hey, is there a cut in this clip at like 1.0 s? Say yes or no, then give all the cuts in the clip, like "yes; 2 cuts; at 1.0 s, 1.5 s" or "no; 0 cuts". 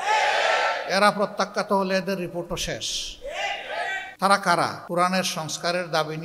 no; 2 cuts; at 4.1 s, 4.8 s